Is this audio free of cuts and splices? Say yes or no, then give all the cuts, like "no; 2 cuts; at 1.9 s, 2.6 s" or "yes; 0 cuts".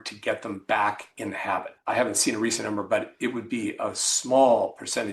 no; 1 cut; at 1.7 s